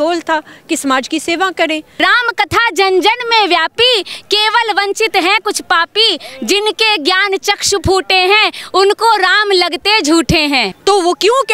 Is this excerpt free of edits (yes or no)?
no